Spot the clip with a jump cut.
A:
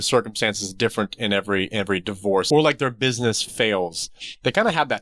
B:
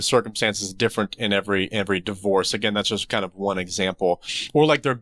A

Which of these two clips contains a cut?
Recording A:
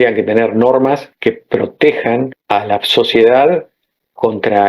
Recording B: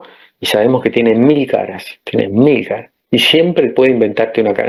A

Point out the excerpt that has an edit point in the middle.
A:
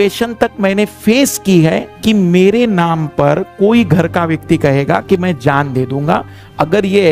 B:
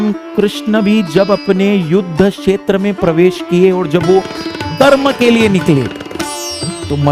A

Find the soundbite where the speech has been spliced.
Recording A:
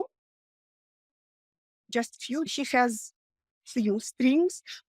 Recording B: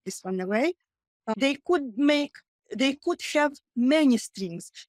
A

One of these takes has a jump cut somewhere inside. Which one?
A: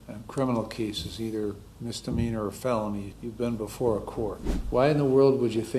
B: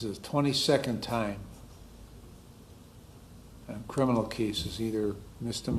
A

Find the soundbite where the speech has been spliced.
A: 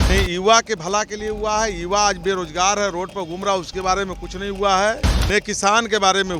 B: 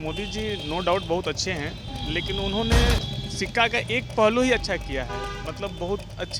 A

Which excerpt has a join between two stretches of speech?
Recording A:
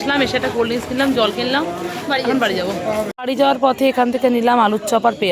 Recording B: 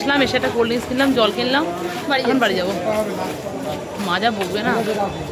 A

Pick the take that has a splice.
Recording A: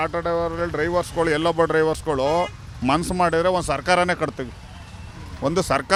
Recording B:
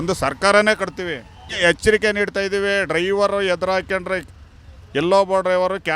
B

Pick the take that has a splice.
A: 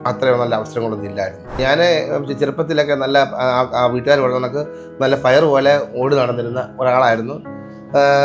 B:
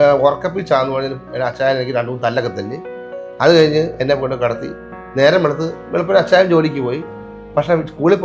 A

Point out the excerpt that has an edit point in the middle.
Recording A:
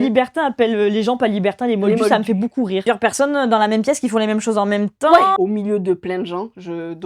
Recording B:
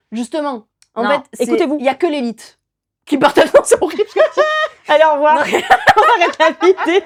A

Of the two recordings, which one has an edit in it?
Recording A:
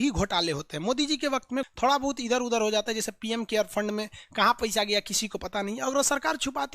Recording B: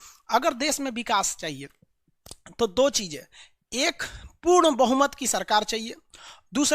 A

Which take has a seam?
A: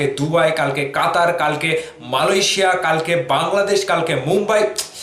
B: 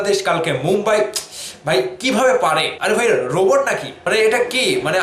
B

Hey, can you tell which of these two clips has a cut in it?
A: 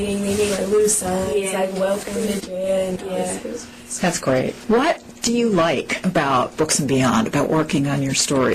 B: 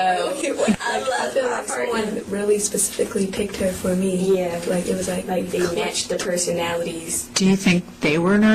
A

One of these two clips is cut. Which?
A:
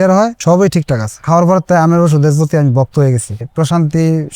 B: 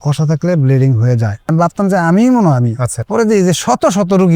A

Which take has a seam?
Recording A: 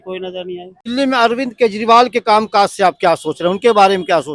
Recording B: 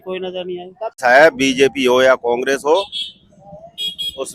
B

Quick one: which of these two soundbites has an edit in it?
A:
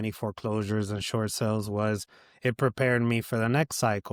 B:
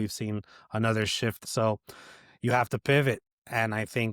B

